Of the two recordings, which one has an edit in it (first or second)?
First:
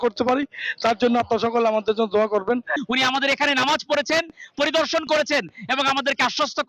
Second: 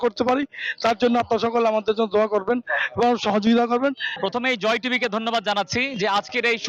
first